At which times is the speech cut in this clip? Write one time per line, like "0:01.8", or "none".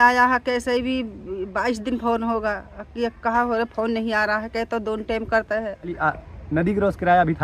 0:05.9

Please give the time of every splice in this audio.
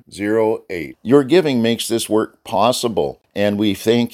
0:03.2

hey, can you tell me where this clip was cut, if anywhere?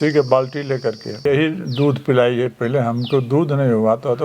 0:01.3

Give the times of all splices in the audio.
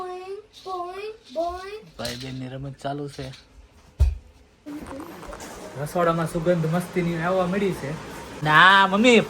0:04.7
0:08.2

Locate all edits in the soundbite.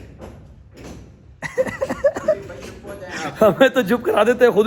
none

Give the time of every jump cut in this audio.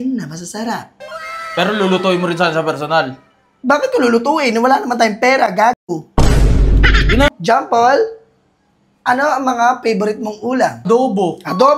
0:07.3
0:10.8

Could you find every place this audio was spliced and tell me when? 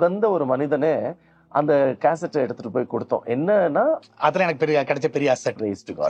0:04.0

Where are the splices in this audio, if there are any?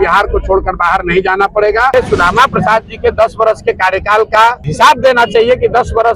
0:01.9
0:04.6

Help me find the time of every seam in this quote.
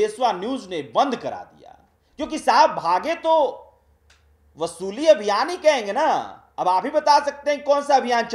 none

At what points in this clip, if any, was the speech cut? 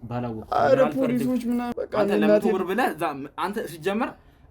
0:01.7

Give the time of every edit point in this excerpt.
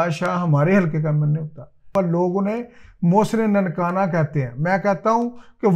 0:01.9

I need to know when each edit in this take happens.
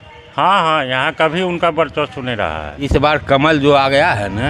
0:02.8

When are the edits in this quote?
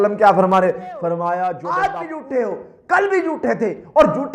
0:01.6

